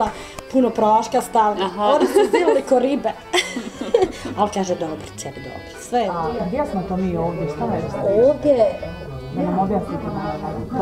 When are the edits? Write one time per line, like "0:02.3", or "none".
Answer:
0:06.1